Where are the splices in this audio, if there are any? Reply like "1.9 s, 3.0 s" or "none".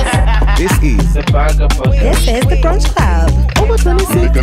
none